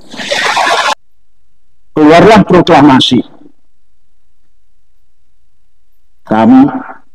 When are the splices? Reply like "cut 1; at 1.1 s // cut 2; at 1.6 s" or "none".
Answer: cut 1; at 0.9 s

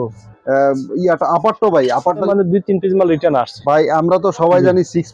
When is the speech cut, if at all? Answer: cut 1; at 2.2 s

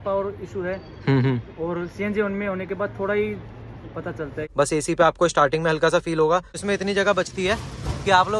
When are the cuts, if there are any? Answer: cut 1; at 4.4 s // cut 2; at 6.6 s

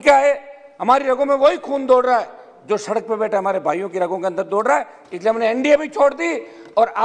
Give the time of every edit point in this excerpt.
none

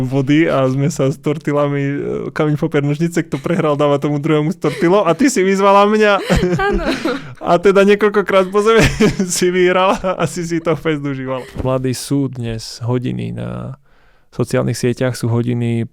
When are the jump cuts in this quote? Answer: cut 1; at 11.6 s

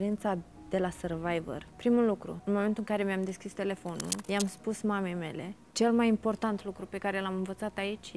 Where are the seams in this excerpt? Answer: cut 1; at 1.7 s // cut 2; at 2.3 s // cut 3; at 4.2 s // cut 4; at 5.7 s

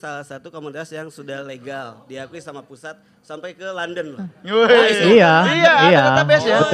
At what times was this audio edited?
none

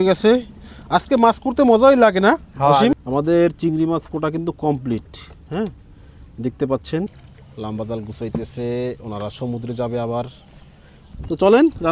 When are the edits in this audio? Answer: cut 1; at 3.0 s // cut 2; at 7.1 s // cut 3; at 10.9 s

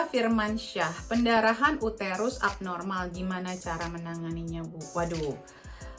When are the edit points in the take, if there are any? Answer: none

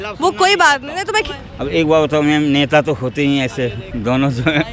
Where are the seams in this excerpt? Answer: cut 1; at 1.2 s

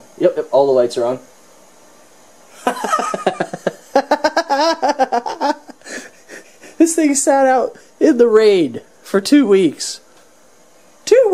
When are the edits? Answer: none

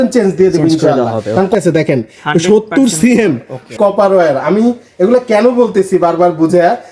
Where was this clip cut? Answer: cut 1; at 1.5 s // cut 2; at 3.7 s

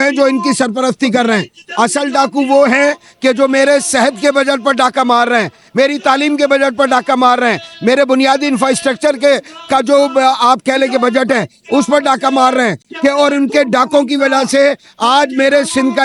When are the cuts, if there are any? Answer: none

